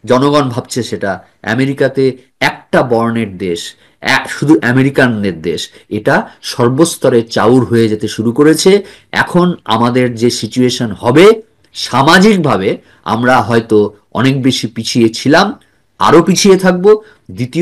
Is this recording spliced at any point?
no; 0 cuts

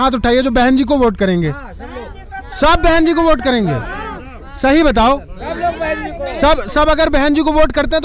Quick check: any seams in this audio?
no; 0 cuts

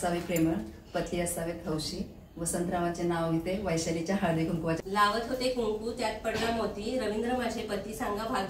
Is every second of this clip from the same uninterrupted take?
no; 1 cut; at 4.7 s

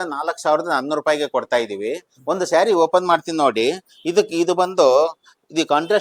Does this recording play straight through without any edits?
yes; 0 cuts

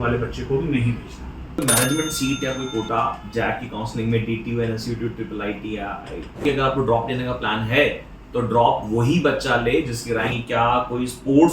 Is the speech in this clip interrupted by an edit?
yes; 3 cuts; at 1.6 s, 6.4 s, 10.4 s

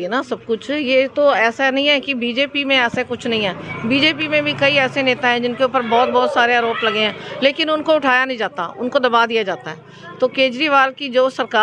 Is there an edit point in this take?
no; 0 cuts

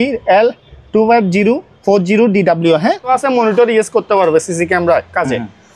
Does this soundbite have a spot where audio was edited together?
yes; 1 cut; at 3.1 s

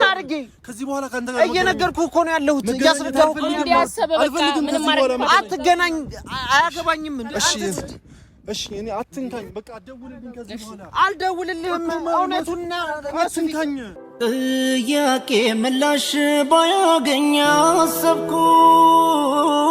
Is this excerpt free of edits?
no; 1 cut; at 13.9 s

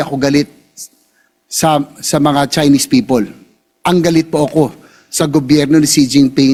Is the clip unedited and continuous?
yes; 0 cuts

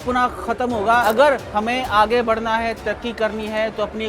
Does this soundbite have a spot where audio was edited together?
yes; 1 cut; at 1.0 s

